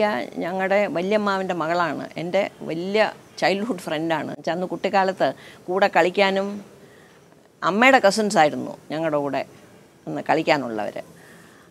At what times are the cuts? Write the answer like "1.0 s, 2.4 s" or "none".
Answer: none